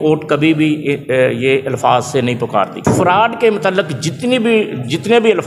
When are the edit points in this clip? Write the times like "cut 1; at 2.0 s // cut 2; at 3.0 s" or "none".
cut 1; at 2.7 s